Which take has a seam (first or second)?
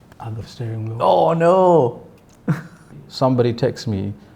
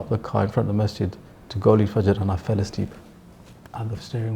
first